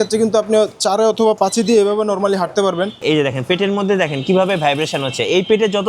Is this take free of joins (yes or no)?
no